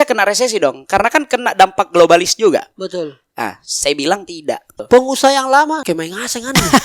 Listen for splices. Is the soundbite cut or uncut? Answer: cut